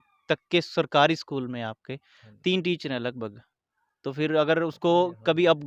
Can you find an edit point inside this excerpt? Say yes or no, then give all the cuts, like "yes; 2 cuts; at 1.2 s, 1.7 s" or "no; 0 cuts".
no; 0 cuts